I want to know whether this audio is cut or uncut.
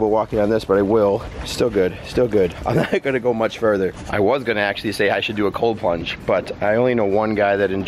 uncut